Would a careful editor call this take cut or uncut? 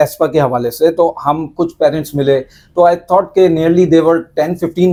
uncut